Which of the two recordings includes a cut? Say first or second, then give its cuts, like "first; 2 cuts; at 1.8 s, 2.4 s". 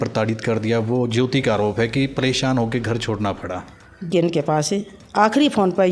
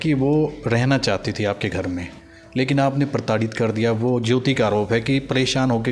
first; 1 cut; at 4.1 s